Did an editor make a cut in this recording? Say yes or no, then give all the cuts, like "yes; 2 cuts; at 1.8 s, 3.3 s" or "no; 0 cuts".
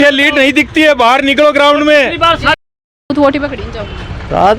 yes; 1 cut; at 2.6 s